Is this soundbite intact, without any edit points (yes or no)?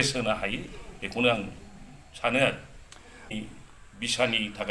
no